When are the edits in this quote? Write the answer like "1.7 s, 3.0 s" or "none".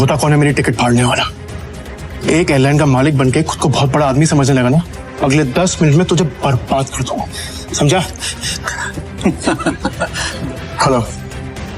5.0 s, 10.2 s